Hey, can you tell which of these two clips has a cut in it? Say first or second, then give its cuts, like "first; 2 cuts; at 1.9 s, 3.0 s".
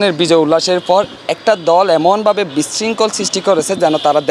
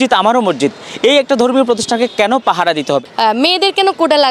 second; 1 cut; at 3.0 s